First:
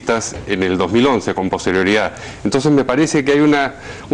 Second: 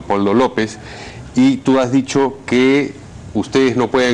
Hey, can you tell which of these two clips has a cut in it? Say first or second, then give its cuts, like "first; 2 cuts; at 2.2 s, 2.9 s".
second; 1 cut; at 2.7 s